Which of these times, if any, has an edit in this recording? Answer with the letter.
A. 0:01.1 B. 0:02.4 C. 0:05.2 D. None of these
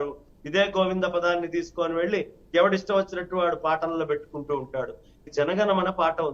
C